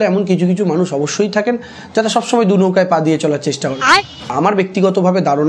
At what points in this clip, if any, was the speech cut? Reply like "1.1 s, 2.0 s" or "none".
4.2 s

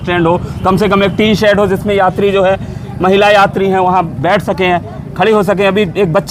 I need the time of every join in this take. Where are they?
none

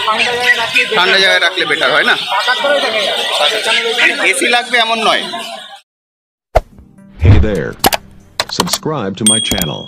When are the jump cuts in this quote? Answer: 5.6 s

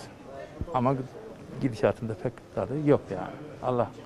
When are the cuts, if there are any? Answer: none

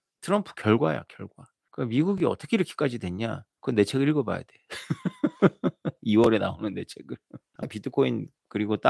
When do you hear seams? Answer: 7.7 s

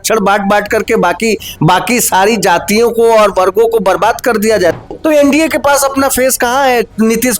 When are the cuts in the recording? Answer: 4.9 s

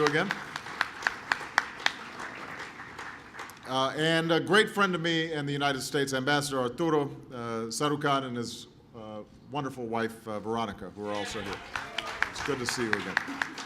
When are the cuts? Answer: 2.9 s

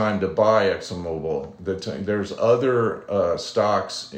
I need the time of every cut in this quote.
none

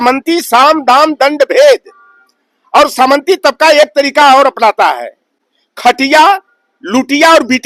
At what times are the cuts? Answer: none

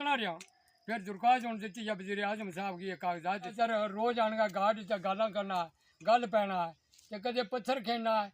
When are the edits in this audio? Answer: 3.5 s

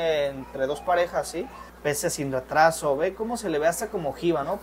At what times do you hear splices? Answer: 1.6 s

